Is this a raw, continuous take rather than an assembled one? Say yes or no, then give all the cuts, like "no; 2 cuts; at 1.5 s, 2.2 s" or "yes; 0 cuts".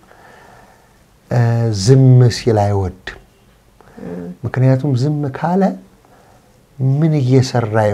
yes; 0 cuts